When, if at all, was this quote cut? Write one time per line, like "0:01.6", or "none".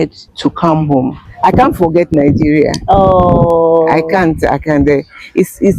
0:01.3